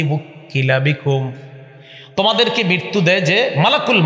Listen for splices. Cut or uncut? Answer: uncut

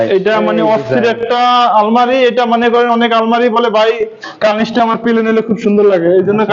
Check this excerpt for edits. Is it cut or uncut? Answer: uncut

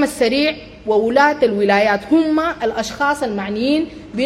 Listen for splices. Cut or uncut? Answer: uncut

